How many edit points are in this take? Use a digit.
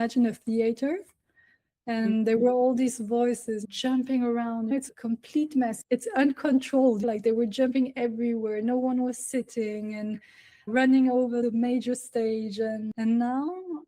1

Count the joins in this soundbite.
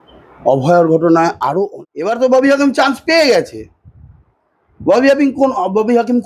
1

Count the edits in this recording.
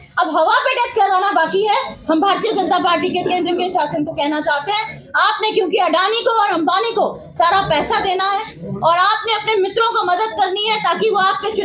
0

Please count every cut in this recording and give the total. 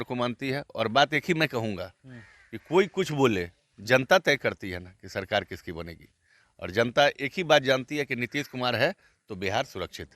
0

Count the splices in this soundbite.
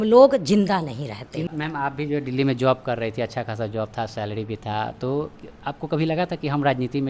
1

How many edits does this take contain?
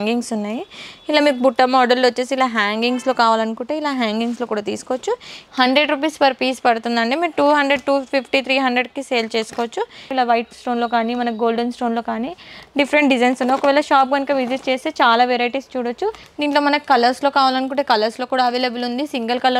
3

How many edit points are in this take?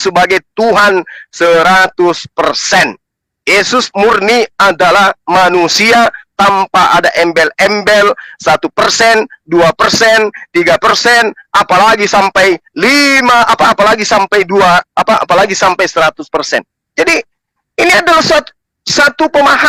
0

